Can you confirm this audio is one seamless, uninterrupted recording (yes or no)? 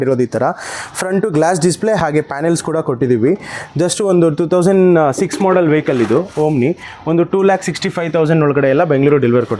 yes